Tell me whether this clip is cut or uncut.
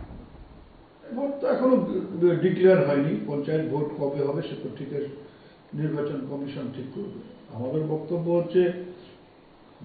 cut